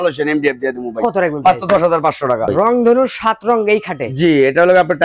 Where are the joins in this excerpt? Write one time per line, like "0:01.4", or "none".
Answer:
0:02.4